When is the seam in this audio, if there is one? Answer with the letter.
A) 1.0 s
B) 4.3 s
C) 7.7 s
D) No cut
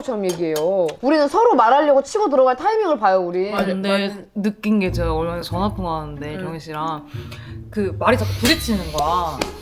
A